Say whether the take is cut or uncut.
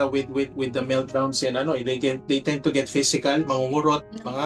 uncut